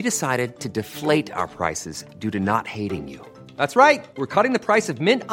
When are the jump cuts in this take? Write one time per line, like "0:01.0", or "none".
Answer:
none